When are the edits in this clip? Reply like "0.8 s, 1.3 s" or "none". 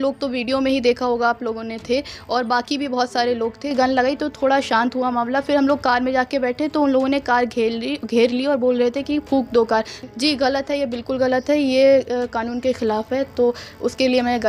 3.7 s, 10.0 s